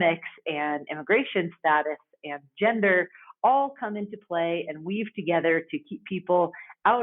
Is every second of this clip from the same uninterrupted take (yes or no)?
yes